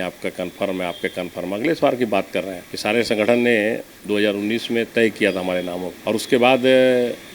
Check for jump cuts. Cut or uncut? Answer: uncut